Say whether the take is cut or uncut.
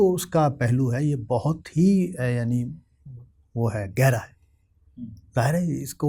uncut